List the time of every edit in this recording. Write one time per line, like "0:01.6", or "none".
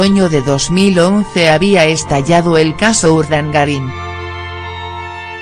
0:02.1